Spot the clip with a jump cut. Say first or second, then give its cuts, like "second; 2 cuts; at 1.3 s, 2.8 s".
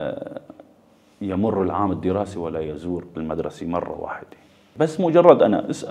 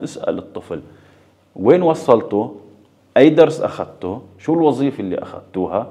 first; 1 cut; at 4.7 s